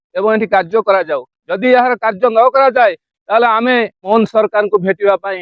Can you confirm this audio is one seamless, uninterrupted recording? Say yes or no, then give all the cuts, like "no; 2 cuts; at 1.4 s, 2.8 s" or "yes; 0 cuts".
no; 1 cut; at 4.1 s